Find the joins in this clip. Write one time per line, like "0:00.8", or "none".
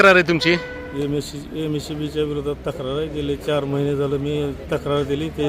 none